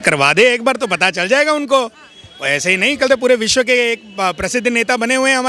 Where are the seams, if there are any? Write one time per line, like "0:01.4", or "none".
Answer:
none